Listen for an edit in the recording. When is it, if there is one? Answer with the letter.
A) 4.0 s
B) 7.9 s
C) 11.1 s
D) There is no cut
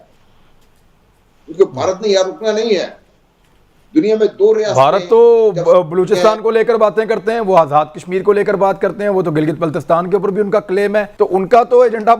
C